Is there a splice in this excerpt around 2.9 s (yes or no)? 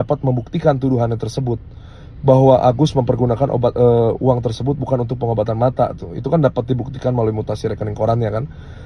no